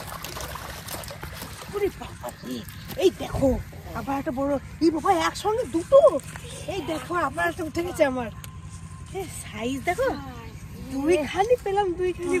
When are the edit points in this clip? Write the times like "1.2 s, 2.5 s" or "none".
none